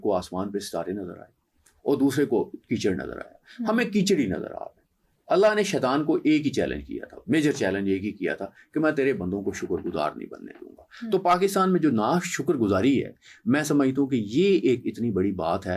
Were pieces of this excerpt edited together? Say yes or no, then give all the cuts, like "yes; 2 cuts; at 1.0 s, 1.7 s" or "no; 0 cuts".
no; 0 cuts